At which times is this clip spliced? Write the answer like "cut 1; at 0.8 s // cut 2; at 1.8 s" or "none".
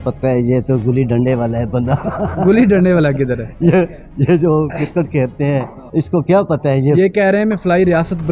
cut 1; at 5.8 s

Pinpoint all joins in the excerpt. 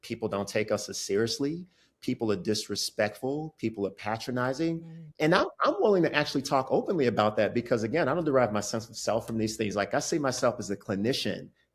none

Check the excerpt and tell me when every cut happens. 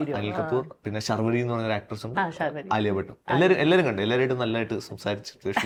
none

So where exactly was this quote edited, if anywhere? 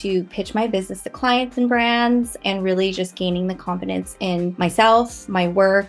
cut 1; at 2.4 s // cut 2; at 4.5 s

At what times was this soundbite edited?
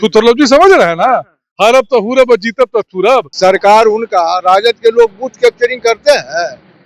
cut 1; at 3.3 s

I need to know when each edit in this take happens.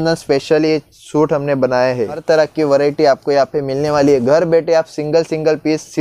cut 1; at 2.2 s

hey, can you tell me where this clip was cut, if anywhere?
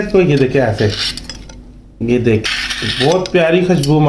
cut 1; at 2.5 s

